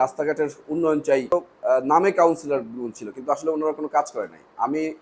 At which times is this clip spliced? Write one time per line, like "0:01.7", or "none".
0:01.3